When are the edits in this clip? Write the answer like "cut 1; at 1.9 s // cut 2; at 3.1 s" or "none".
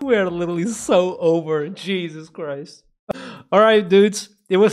cut 1; at 3.1 s